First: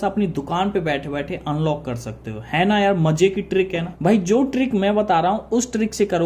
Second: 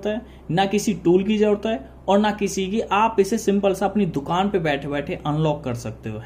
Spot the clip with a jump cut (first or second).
first